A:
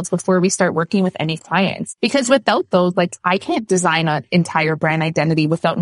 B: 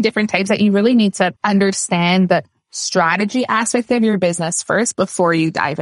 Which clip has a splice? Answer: A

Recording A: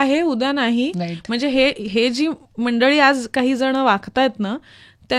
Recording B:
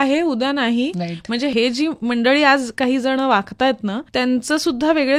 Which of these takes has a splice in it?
B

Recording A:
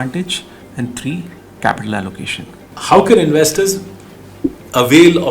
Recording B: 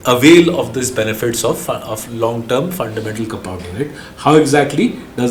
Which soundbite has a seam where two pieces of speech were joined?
A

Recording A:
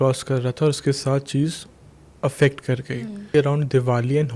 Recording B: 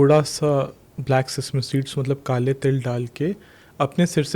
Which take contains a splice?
A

